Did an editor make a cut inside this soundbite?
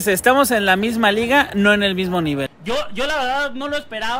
yes; 1 cut; at 2.5 s

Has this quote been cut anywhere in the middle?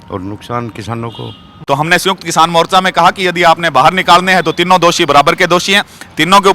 yes; 1 cut; at 1.5 s

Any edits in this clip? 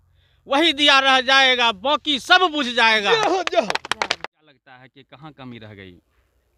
yes; 1 cut; at 4.2 s

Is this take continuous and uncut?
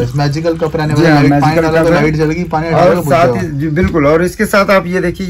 yes; 0 cuts

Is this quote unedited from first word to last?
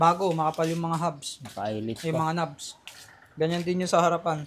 yes; 0 cuts

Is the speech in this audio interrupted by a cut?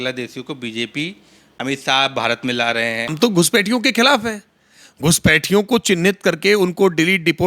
yes; 2 cuts; at 1.4 s, 3.1 s

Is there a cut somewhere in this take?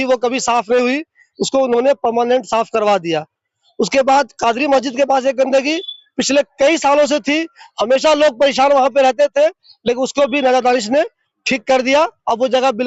no; 0 cuts

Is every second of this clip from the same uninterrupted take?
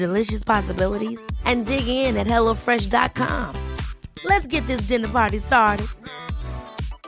yes; 0 cuts

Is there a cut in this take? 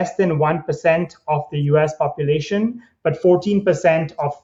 no; 0 cuts

